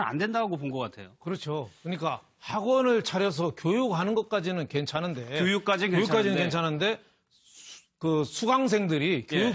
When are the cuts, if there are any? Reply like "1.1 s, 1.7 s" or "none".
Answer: none